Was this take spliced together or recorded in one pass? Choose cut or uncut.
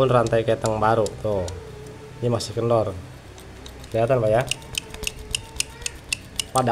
cut